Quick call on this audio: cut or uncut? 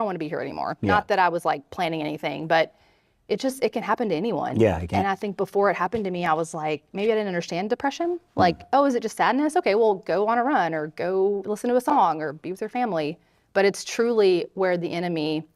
uncut